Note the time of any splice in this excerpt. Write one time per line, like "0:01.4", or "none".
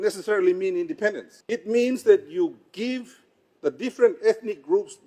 0:01.3